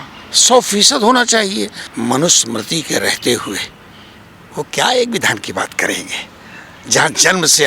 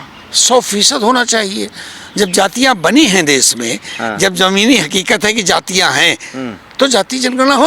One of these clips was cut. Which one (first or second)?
first